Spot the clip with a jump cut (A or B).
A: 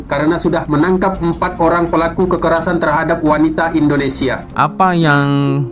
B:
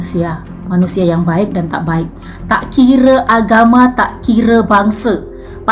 A